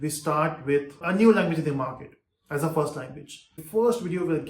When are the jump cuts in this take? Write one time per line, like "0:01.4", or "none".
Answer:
0:01.0
0:03.5